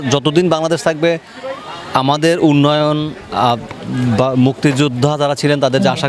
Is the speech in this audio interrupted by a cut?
no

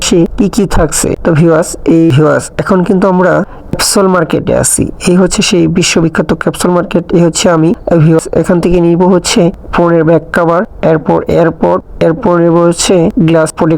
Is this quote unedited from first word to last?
no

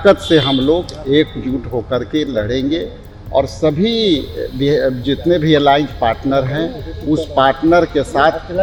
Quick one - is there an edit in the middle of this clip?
no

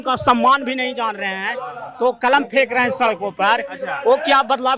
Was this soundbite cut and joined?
no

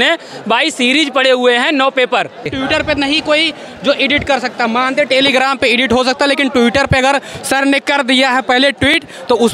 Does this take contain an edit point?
yes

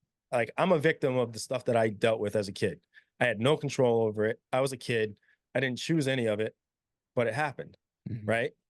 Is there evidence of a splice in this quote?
no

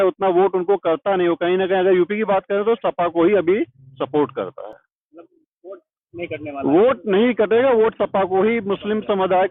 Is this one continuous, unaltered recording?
yes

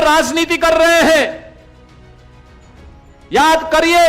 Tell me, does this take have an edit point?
no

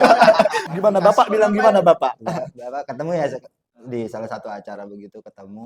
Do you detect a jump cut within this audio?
no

